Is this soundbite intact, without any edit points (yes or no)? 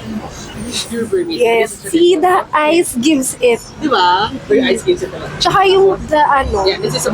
no